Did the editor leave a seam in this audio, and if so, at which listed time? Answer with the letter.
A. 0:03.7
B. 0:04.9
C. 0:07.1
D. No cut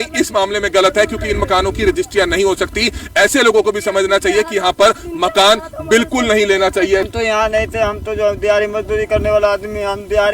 C